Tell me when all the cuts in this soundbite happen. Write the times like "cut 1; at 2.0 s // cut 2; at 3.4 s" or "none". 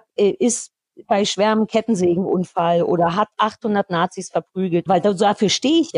cut 1; at 4.8 s